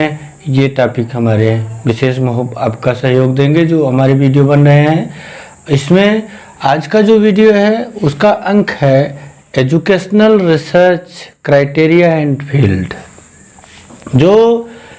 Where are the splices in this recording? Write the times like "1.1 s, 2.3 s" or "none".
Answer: none